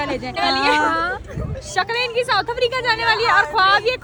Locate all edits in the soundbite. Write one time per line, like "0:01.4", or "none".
none